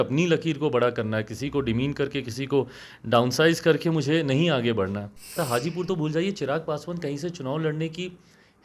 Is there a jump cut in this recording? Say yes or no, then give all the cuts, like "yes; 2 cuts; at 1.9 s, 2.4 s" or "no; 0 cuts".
yes; 1 cut; at 5.3 s